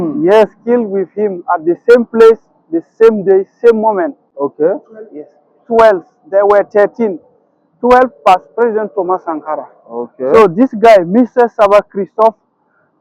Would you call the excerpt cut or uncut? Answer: uncut